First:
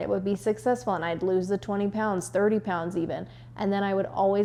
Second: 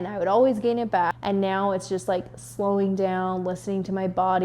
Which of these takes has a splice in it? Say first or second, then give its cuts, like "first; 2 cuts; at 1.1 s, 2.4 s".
second; 1 cut; at 1.1 s